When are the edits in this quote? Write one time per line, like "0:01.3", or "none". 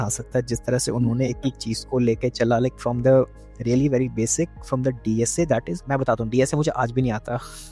0:05.8